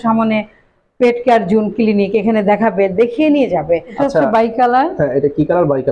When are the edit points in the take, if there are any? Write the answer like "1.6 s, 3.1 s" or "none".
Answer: 4.0 s

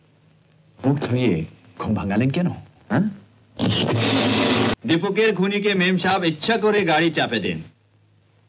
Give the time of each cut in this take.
4.7 s

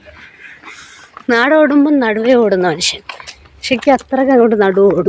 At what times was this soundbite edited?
none

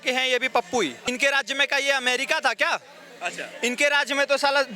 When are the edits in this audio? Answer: 1.0 s

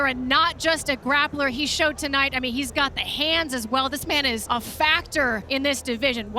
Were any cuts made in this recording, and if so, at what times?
4.4 s, 5.4 s

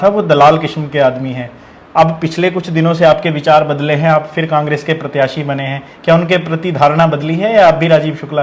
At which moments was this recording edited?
none

